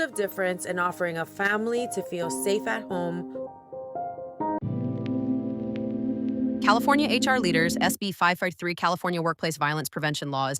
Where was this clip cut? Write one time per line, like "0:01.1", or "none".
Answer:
0:04.5